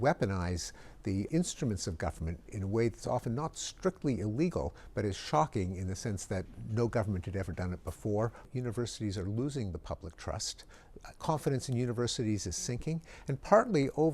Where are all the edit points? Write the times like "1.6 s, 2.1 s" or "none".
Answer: 1.3 s, 8.4 s